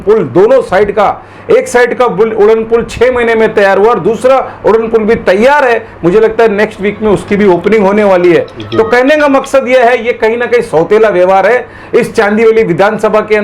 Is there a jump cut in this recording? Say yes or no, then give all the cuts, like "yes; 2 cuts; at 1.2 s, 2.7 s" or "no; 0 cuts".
no; 0 cuts